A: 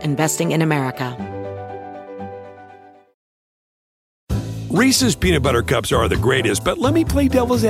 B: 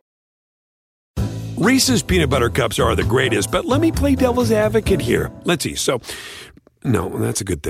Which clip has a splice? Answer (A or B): A